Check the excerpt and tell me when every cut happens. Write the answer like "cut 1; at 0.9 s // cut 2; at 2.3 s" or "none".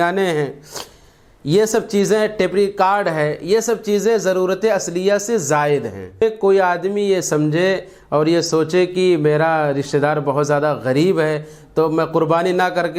cut 1; at 6.2 s